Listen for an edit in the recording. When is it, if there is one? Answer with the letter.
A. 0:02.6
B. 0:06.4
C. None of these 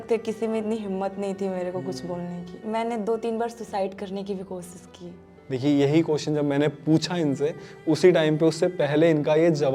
A